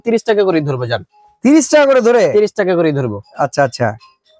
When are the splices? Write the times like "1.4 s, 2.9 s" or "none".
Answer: none